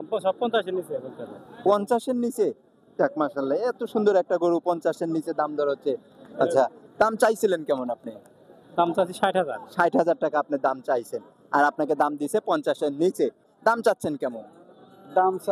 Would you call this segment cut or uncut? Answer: cut